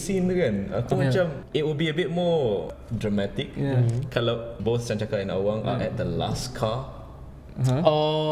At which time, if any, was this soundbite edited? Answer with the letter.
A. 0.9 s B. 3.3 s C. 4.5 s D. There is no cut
C